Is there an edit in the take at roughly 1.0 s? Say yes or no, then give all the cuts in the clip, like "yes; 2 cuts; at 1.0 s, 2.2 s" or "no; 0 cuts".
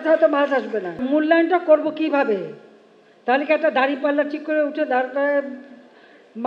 yes; 1 cut; at 1.0 s